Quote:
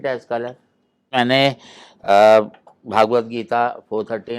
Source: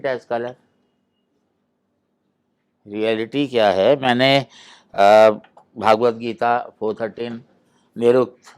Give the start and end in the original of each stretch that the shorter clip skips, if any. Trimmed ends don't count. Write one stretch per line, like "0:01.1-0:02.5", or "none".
0:01.1-0:04.0